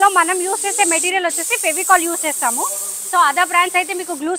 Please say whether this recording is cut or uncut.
uncut